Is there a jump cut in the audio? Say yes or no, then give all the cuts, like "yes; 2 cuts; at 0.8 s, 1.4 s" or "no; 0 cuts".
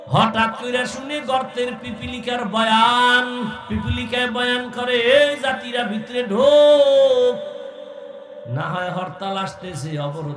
yes; 1 cut; at 3.6 s